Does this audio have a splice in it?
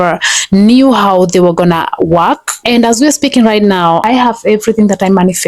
yes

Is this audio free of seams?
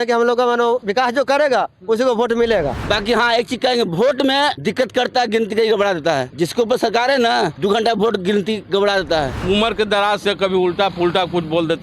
no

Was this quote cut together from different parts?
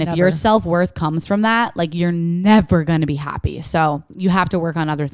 no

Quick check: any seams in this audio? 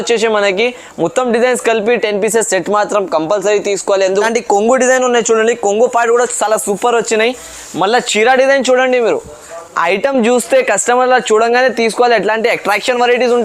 yes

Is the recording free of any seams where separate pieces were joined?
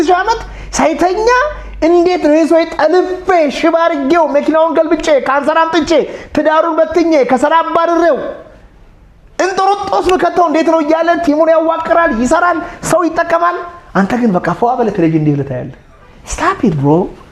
yes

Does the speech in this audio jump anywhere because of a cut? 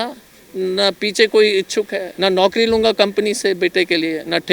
yes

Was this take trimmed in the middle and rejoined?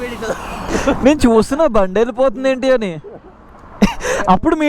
no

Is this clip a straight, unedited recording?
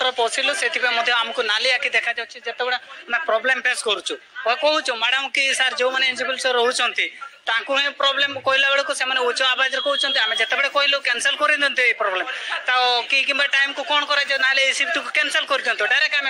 yes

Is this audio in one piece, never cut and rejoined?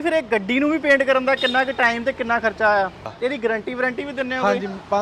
no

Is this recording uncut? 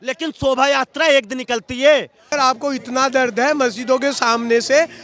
no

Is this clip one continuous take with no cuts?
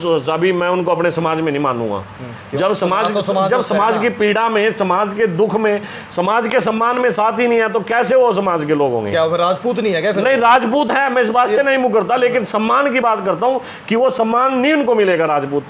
yes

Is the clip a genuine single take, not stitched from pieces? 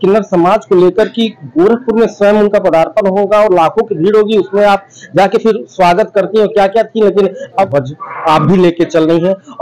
no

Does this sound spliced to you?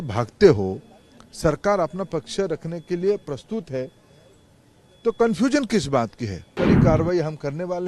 yes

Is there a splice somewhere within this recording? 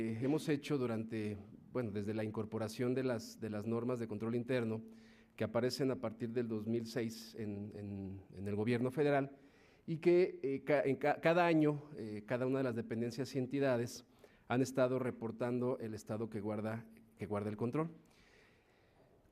yes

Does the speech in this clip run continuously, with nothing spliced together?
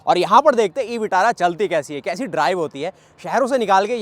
yes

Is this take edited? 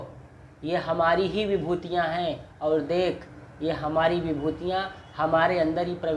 no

